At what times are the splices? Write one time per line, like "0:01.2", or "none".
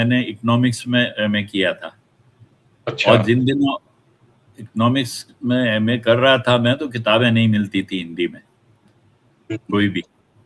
none